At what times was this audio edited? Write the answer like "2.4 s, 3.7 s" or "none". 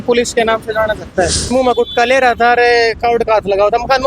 1.5 s